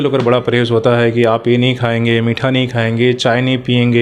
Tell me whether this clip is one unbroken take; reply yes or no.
yes